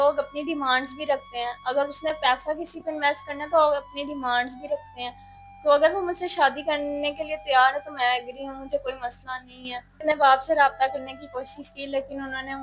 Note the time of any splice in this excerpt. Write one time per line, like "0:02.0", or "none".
0:10.0